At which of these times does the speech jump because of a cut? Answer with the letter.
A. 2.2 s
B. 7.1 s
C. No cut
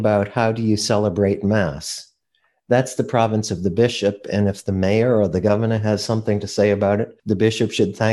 B